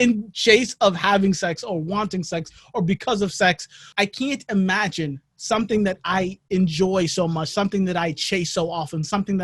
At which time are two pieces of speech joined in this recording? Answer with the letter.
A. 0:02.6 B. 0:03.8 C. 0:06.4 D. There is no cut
B